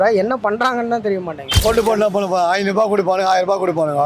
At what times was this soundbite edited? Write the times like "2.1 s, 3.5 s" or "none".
1.4 s

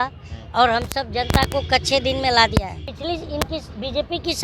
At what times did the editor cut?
2.8 s

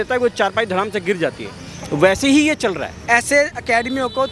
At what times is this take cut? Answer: 2.9 s

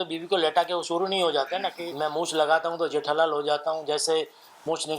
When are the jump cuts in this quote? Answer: 1.8 s

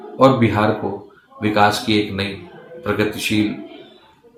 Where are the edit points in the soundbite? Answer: none

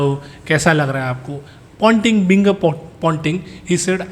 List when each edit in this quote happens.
none

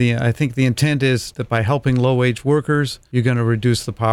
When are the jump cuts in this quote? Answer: 1.3 s, 3.0 s

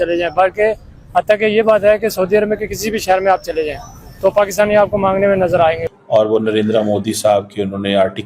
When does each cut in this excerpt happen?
5.9 s

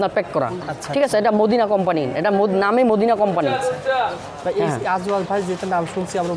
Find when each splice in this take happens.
none

